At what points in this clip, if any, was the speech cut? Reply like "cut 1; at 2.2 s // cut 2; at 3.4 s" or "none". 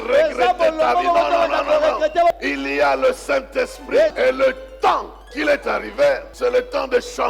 cut 1; at 2.3 s // cut 2; at 4.1 s // cut 3; at 5.3 s // cut 4; at 6.3 s